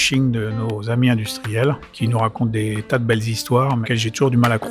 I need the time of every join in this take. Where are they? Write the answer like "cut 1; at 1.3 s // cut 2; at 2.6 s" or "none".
cut 1; at 1.9 s // cut 2; at 3.8 s